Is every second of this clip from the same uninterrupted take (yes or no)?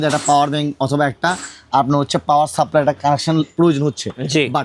yes